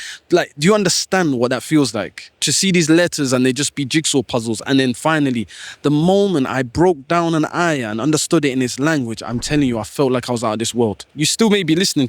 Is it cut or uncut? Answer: cut